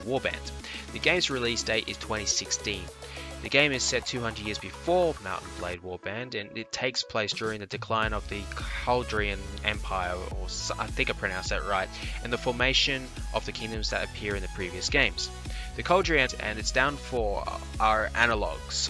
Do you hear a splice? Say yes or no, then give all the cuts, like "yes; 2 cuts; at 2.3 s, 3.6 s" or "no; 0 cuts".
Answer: yes; 1 cut; at 7.2 s